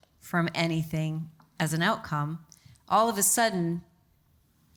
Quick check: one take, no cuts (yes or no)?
yes